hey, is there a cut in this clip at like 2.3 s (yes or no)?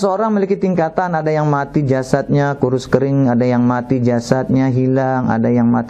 no